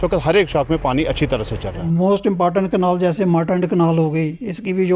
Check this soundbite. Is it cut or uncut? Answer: cut